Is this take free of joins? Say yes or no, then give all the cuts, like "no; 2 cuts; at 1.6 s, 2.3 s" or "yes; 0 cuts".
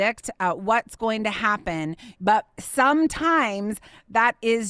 no; 1 cut; at 2.0 s